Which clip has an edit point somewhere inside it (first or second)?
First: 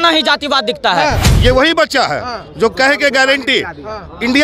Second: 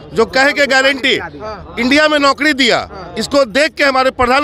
first